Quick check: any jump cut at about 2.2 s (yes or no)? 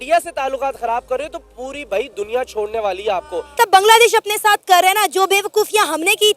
no